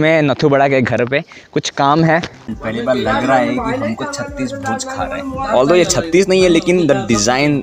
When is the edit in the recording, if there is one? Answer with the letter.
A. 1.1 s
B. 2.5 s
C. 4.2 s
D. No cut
B